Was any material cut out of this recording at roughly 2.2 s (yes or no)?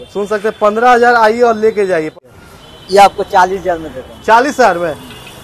yes